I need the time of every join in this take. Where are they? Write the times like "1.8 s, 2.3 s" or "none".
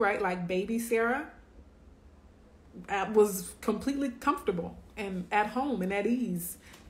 none